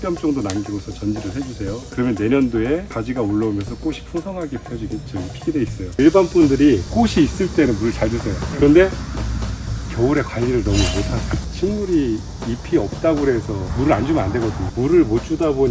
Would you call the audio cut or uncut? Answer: cut